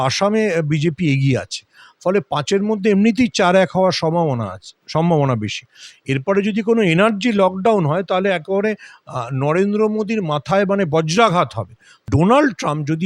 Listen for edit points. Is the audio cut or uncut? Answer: cut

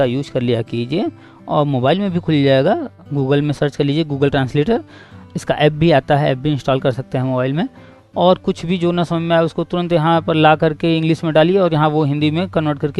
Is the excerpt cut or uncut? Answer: uncut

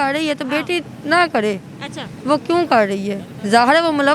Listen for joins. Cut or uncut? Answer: uncut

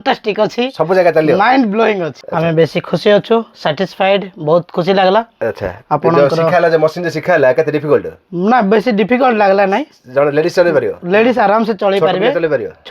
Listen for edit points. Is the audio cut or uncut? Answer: cut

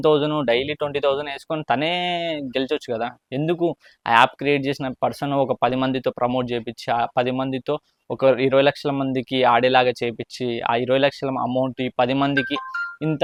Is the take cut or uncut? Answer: uncut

